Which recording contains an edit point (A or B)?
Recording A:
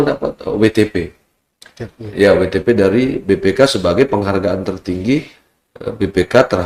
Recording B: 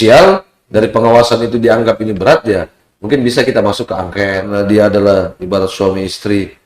B